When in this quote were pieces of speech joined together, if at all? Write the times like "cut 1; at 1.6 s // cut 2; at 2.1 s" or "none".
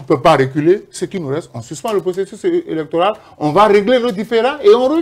none